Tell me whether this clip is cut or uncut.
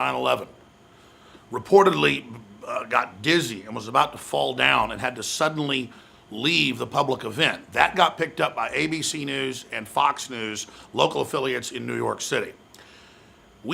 cut